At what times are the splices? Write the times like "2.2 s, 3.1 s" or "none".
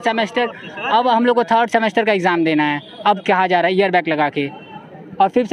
none